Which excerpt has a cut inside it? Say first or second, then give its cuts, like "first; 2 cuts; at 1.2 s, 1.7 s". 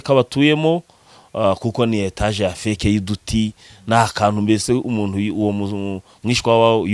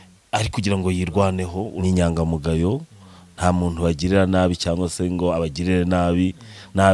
second; 1 cut; at 1.6 s